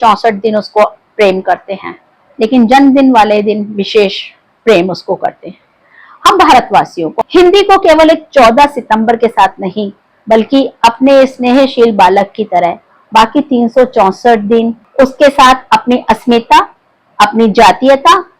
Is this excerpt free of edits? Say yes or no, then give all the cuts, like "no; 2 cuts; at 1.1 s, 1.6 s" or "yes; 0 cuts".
no; 2 cuts; at 7.0 s, 14.8 s